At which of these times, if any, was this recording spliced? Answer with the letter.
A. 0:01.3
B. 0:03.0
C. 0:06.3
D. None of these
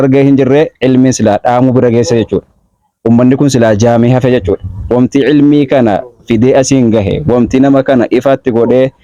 D